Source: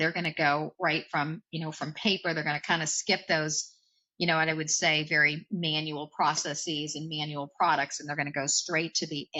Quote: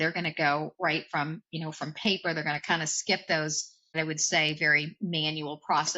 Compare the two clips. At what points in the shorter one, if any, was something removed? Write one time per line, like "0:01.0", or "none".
0:04.0